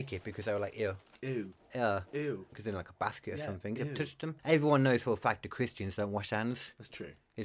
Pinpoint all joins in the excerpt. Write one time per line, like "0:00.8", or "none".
0:02.5
0:04.4